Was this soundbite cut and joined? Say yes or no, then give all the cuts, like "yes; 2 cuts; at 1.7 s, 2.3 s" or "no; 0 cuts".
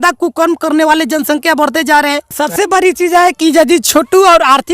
yes; 1 cut; at 2.4 s